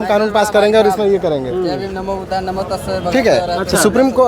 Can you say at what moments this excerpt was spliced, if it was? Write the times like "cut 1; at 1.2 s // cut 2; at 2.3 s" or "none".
none